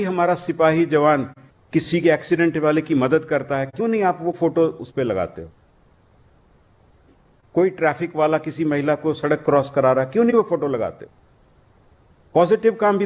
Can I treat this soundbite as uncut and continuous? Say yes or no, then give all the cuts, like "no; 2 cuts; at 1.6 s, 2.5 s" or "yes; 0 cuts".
yes; 0 cuts